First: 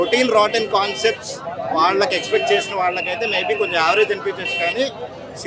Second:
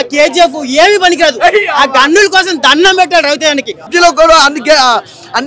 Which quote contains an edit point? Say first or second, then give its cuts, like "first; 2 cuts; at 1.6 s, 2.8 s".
second; 1 cut; at 3.9 s